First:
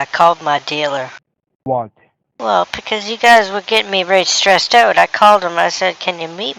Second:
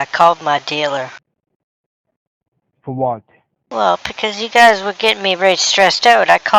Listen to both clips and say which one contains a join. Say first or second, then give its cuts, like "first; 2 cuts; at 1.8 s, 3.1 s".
first; 1 cut; at 1.6 s